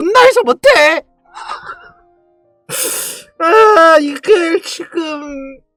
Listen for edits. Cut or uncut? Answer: uncut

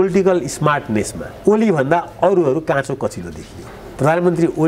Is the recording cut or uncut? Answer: uncut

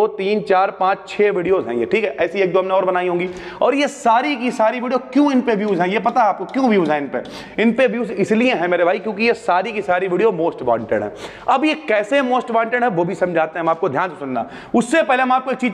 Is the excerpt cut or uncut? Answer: uncut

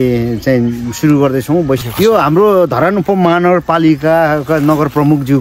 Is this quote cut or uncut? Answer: cut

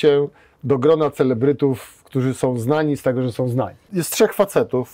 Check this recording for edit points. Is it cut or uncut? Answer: cut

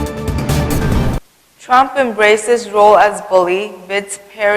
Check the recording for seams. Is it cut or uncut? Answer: cut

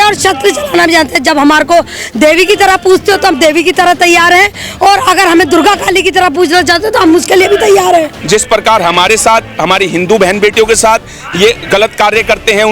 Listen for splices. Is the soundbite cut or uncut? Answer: cut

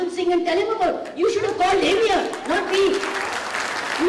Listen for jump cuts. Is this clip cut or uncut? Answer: uncut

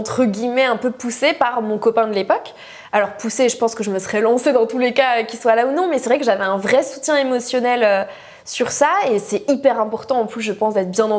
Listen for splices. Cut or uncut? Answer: uncut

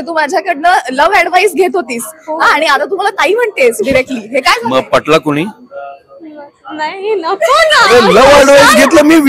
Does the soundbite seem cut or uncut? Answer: uncut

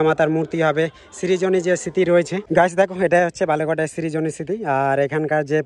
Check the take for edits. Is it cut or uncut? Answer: cut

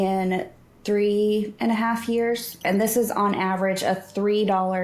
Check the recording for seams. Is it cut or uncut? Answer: cut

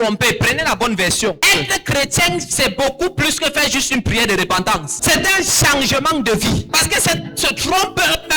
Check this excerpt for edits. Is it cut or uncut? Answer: cut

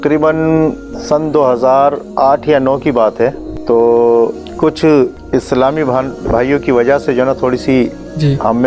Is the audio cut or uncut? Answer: cut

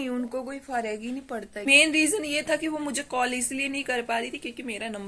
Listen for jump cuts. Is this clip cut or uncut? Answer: cut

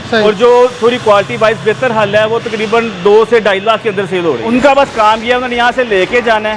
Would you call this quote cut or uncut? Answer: cut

